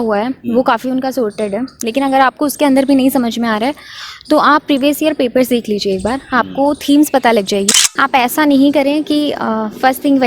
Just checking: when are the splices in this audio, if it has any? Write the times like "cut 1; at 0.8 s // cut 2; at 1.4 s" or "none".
cut 1; at 7.7 s

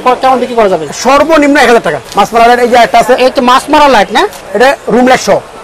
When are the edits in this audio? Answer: cut 1; at 2.0 s // cut 2; at 4.4 s

